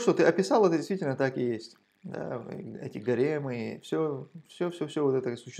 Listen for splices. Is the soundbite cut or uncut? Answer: uncut